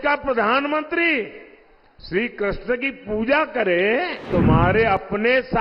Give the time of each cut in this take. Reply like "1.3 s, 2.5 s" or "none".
4.3 s